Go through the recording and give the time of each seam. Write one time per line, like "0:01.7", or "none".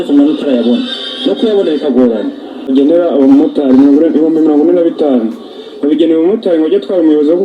0:02.7